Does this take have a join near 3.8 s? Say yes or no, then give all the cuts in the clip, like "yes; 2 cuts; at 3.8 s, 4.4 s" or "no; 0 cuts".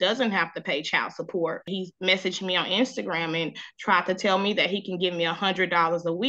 no; 1 cut; at 1.7 s